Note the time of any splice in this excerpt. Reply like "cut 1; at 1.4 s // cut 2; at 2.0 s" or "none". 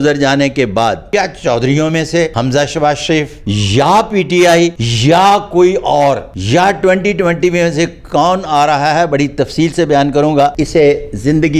cut 1; at 1.0 s // cut 2; at 2.3 s // cut 3; at 3.4 s // cut 4; at 4.9 s // cut 5; at 6.3 s // cut 6; at 10.5 s